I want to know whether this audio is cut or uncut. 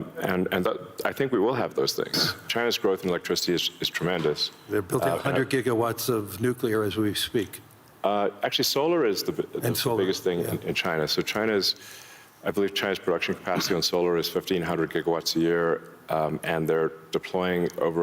cut